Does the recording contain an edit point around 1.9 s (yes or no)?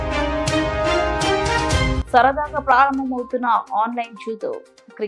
no